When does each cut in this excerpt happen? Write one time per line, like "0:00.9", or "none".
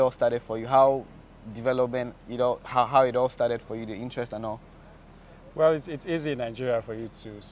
none